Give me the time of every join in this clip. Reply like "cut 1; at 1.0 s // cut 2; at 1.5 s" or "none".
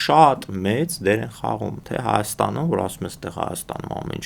none